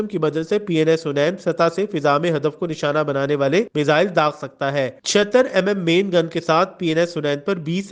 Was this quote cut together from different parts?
no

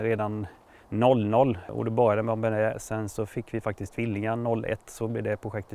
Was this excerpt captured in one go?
no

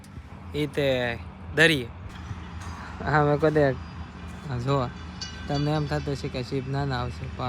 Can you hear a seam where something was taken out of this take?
yes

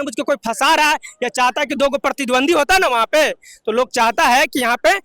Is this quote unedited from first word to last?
yes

